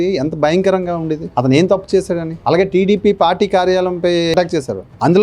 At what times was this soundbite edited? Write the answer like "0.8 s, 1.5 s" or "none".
4.3 s